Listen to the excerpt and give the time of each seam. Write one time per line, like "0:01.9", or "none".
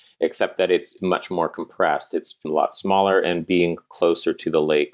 none